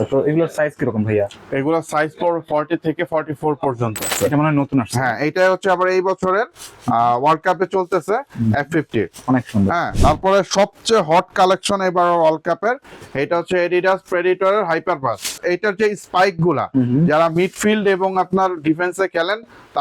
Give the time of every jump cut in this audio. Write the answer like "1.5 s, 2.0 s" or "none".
4.1 s, 9.9 s, 15.4 s